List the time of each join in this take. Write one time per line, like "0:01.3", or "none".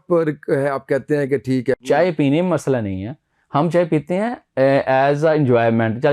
0:01.8